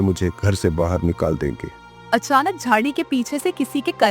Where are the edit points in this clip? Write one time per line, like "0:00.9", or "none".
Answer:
0:02.1